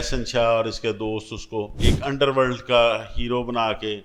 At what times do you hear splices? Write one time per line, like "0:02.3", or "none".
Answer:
0:01.7